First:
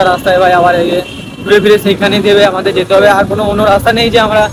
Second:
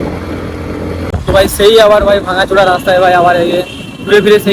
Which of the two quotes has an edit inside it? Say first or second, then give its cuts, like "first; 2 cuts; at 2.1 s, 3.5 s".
second; 1 cut; at 1.1 s